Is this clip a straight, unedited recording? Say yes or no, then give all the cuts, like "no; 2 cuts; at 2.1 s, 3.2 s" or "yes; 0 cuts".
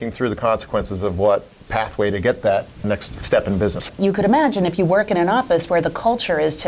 no; 2 cuts; at 3.1 s, 3.8 s